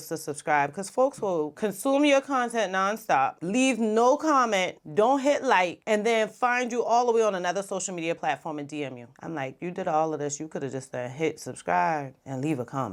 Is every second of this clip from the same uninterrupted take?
yes; 0 cuts

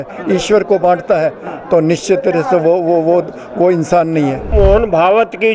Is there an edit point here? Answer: yes; 1 cut; at 4.5 s

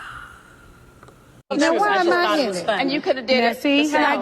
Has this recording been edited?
yes; 1 cut; at 1.4 s

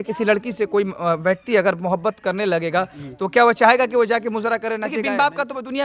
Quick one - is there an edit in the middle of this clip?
yes; 1 cut; at 4.9 s

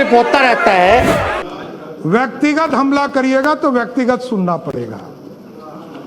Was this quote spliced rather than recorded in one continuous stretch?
yes; 1 cut; at 1.5 s

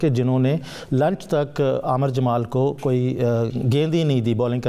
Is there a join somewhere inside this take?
no; 0 cuts

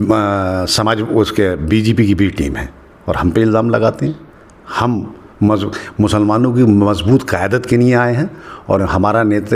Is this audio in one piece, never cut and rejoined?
yes; 0 cuts

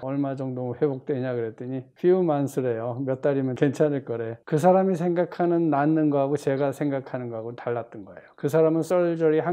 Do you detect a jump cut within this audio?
no; 0 cuts

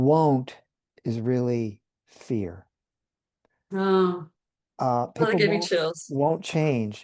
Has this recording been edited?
no; 0 cuts

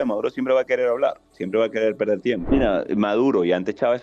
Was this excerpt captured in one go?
no; 1 cut; at 2.4 s

